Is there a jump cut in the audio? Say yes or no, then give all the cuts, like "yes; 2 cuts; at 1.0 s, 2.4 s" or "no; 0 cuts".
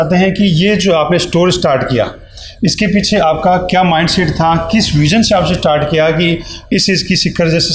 no; 0 cuts